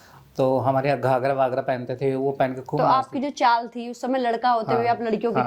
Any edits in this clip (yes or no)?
yes